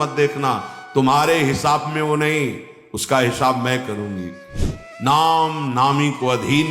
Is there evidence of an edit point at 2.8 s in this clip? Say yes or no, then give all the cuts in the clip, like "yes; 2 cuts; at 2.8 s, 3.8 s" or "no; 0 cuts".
no; 1 cut; at 4.4 s